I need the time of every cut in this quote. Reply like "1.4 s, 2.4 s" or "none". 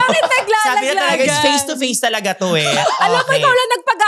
none